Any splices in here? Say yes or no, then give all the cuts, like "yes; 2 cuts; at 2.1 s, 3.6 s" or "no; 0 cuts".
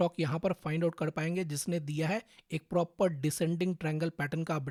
no; 0 cuts